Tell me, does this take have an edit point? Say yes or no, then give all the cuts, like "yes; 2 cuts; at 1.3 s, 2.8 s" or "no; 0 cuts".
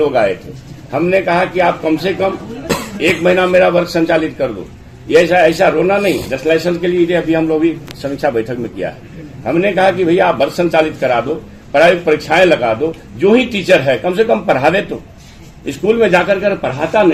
no; 0 cuts